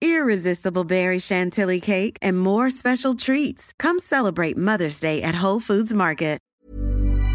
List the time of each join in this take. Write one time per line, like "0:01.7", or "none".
0:06.4